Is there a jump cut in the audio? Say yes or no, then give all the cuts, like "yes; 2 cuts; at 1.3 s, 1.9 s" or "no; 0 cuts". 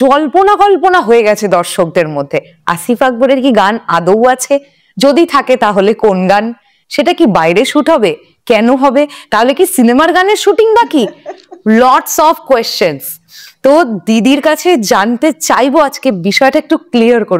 no; 0 cuts